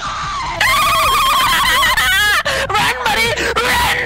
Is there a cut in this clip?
no; 0 cuts

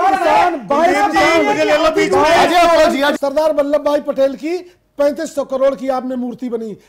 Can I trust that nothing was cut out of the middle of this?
no; 1 cut; at 3.1 s

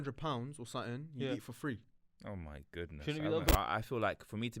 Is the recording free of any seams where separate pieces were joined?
no; 1 cut; at 3.5 s

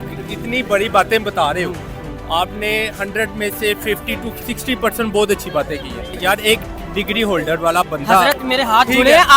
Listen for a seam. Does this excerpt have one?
yes; 1 cut; at 6.2 s

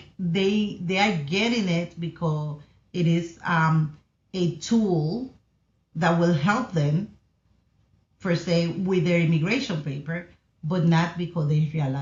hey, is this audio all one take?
yes; 0 cuts

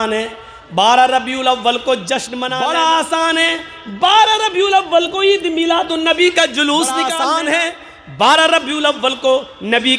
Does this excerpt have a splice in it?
yes; 2 cuts; at 2.4 s, 7.1 s

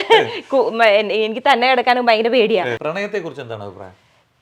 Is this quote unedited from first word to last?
no; 1 cut; at 2.8 s

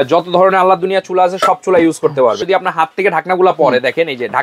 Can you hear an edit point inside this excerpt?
yes; 1 cut; at 2.4 s

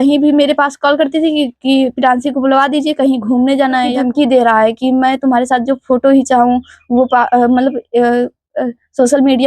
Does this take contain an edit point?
yes; 1 cut; at 3.9 s

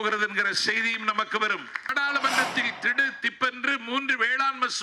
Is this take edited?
yes; 1 cut; at 1.9 s

